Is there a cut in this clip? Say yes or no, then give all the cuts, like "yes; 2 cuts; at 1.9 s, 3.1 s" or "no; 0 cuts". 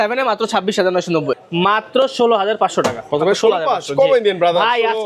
yes; 1 cut; at 1.4 s